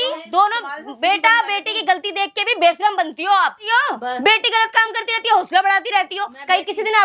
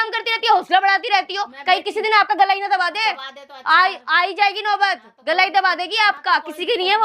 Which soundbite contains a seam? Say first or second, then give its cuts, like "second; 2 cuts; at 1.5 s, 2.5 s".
first; 1 cut; at 3.7 s